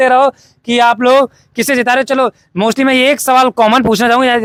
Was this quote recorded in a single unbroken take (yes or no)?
yes